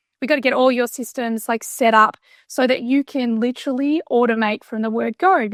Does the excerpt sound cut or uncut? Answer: uncut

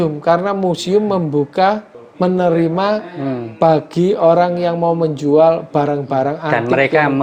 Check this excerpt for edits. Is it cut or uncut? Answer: uncut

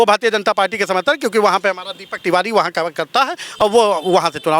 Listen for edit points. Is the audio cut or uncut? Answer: uncut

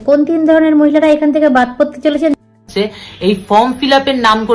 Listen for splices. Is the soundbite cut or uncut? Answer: cut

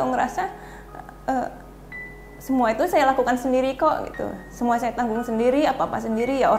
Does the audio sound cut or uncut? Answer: uncut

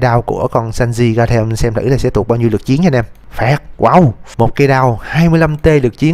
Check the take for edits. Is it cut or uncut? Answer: cut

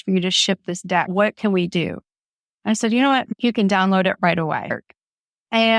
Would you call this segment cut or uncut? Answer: cut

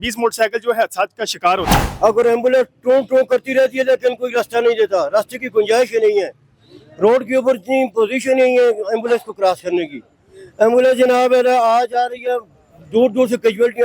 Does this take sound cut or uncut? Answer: cut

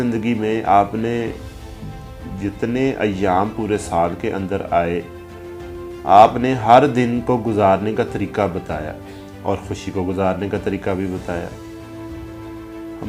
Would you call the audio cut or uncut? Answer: uncut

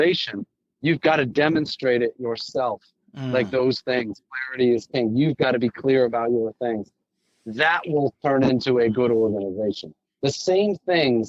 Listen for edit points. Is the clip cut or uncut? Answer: uncut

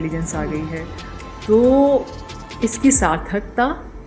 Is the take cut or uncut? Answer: cut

